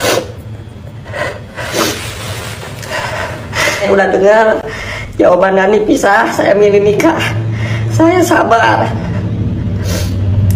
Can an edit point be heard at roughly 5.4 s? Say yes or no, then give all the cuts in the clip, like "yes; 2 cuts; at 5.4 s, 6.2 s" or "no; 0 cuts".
no; 1 cut; at 3.8 s